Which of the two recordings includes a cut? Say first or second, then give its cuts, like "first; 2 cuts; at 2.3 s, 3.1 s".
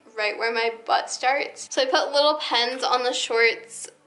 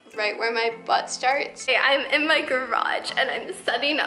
second; 1 cut; at 1.5 s